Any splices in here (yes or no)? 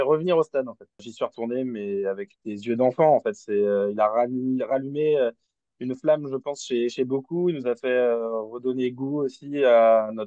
no